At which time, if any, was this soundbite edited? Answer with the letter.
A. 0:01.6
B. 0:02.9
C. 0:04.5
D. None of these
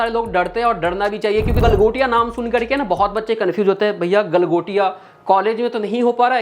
A